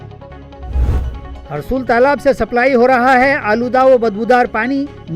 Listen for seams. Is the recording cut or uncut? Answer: cut